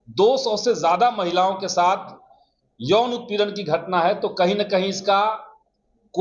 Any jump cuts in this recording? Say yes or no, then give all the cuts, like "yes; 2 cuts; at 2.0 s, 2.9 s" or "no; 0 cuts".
no; 0 cuts